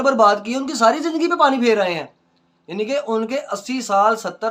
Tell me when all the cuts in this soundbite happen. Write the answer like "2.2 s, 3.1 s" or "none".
none